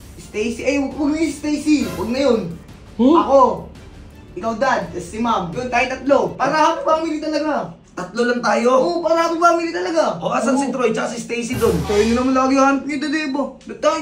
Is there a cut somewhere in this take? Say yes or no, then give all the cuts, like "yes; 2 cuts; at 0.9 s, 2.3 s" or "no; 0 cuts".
no; 0 cuts